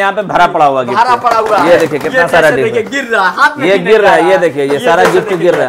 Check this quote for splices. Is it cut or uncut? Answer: uncut